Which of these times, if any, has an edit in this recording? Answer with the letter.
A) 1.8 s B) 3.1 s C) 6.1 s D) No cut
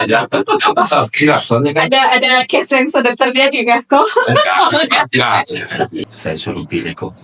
C